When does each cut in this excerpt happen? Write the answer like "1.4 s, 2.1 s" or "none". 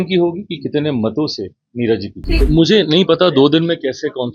2.3 s

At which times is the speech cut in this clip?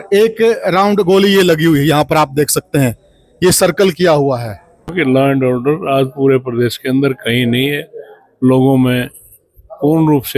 4.9 s

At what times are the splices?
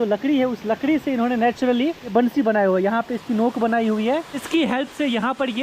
2.1 s, 4.4 s

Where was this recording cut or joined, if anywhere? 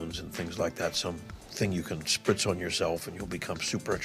none

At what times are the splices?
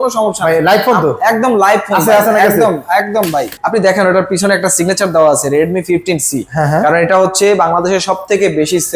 3.6 s

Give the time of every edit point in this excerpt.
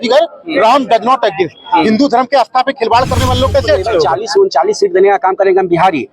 4.1 s

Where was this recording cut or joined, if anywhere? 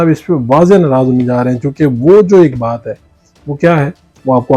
none

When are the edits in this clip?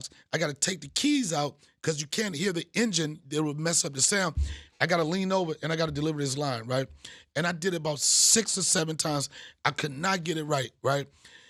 none

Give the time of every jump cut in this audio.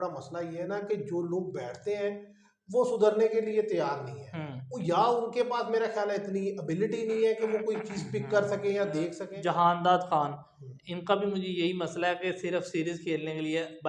9.2 s

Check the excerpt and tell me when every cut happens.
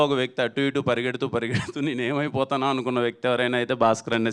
none

